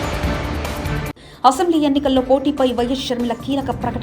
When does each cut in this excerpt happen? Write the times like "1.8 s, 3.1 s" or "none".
none